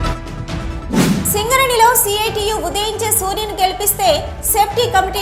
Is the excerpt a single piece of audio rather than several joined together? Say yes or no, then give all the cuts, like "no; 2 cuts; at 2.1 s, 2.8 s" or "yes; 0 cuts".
no; 1 cut; at 1.2 s